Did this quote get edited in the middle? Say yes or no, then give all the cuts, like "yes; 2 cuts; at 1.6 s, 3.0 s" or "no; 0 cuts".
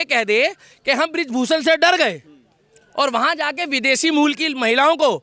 no; 0 cuts